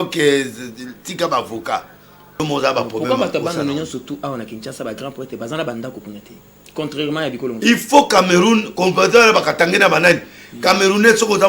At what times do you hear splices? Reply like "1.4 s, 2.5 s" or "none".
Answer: 2.4 s